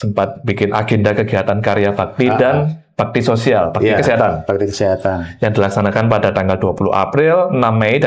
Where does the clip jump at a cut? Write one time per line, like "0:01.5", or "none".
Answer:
none